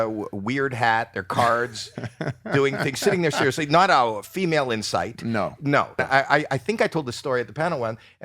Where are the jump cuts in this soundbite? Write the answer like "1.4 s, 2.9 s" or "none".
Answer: 6.0 s